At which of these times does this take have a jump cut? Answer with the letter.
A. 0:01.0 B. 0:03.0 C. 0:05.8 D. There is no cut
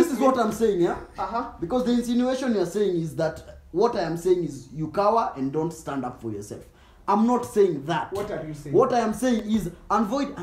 D